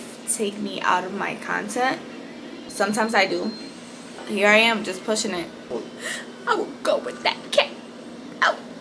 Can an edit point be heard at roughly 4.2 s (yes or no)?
yes